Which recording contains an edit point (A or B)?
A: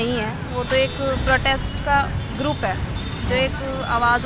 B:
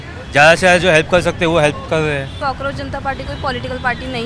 B